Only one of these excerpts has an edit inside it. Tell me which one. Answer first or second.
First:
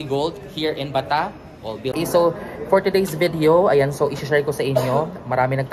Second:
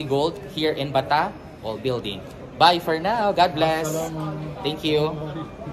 first